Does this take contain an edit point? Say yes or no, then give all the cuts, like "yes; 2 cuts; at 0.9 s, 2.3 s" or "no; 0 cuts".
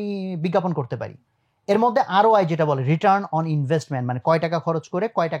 no; 0 cuts